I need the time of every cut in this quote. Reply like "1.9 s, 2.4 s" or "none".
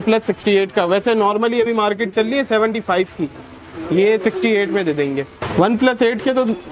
5.4 s